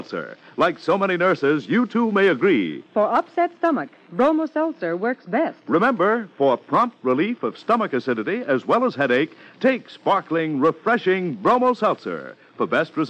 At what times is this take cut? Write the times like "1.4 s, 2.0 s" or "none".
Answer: none